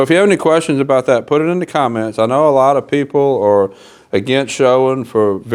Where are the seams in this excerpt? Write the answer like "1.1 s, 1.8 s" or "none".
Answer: none

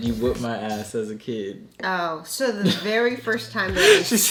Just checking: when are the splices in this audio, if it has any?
none

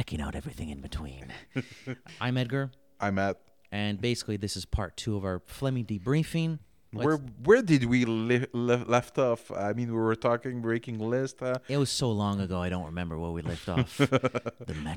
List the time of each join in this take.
2.1 s

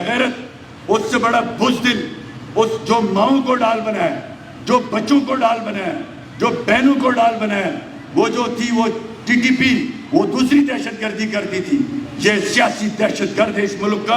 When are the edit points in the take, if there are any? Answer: none

